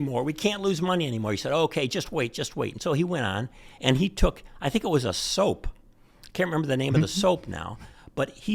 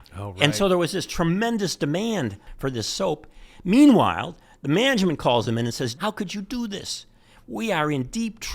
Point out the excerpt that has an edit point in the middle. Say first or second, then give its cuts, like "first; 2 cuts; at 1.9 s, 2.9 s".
second; 2 cuts; at 2.5 s, 6.0 s